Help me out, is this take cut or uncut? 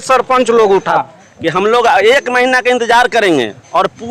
cut